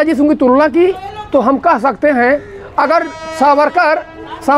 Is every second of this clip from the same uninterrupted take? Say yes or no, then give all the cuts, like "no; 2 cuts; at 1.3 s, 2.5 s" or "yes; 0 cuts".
yes; 0 cuts